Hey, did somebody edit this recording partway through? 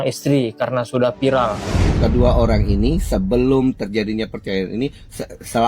yes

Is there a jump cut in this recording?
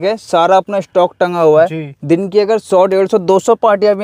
no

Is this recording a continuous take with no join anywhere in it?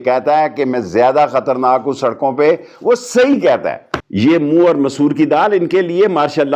yes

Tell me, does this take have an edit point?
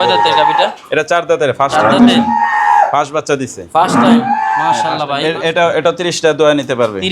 yes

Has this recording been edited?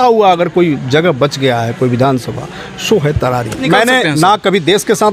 yes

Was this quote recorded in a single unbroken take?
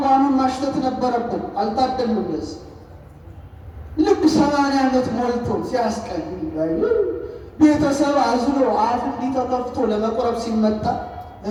yes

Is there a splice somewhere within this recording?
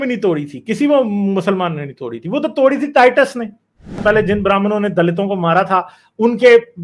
yes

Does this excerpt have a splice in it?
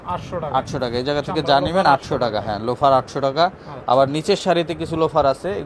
no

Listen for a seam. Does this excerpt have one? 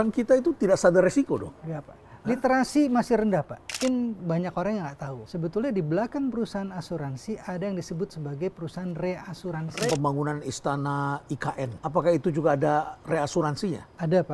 yes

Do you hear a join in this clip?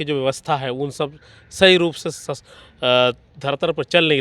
no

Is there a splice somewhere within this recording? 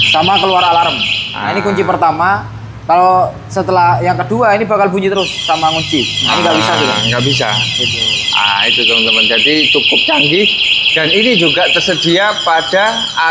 no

